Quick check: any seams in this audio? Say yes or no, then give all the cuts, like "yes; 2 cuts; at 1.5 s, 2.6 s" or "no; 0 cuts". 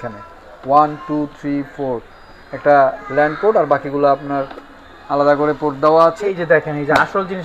yes; 1 cut; at 6.4 s